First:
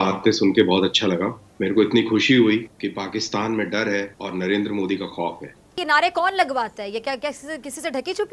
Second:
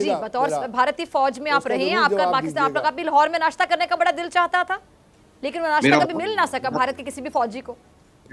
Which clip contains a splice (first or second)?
first